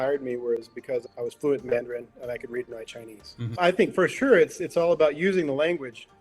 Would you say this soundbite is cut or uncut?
cut